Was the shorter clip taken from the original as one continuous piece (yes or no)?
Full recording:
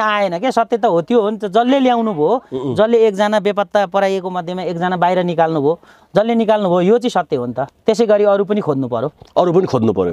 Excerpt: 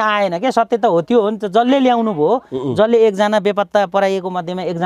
yes